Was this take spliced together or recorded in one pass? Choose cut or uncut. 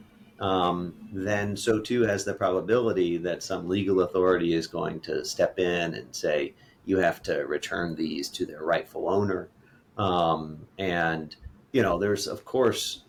uncut